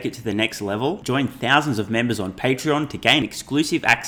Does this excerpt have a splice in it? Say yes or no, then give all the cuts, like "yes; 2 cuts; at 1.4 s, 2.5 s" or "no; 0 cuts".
no; 0 cuts